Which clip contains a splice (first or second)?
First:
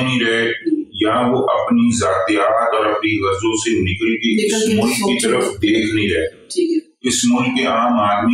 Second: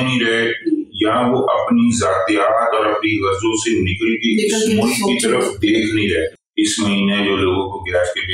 second